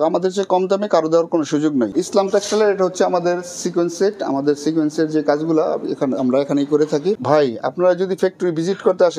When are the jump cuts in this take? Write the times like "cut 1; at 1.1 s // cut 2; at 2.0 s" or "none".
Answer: cut 1; at 2.0 s // cut 2; at 7.2 s